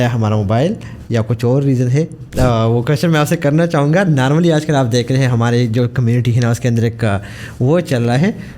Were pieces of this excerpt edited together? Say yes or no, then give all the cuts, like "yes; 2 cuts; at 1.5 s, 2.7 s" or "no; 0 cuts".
yes; 1 cut; at 2.3 s